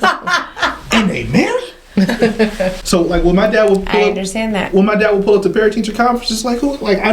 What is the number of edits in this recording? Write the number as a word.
one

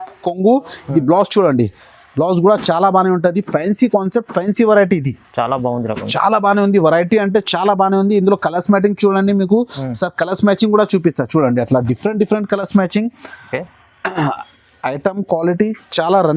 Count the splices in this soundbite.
zero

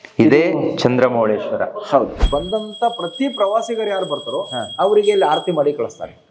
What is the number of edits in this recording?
one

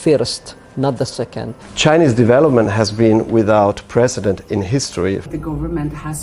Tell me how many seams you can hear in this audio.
one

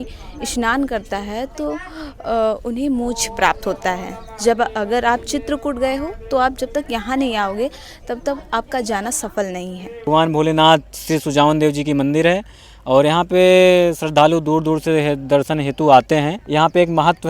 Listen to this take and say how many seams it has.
two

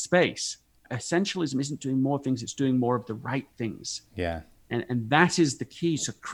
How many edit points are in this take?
one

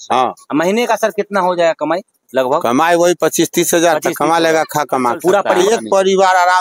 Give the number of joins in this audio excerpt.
one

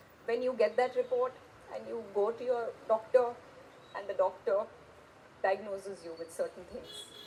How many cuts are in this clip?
zero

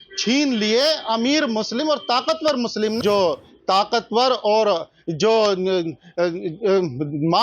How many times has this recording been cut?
one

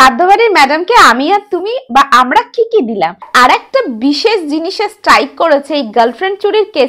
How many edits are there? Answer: one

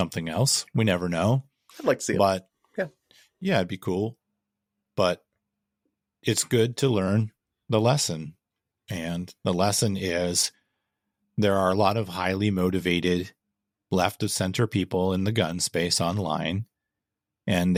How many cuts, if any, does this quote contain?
zero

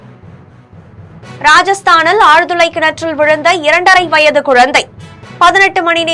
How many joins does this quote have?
one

